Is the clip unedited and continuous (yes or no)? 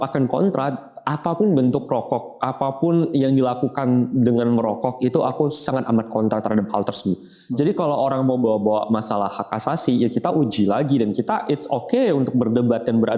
yes